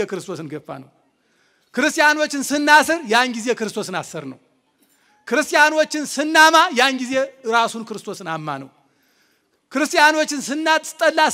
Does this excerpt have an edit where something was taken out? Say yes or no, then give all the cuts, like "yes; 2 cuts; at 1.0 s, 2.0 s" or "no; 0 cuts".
no; 0 cuts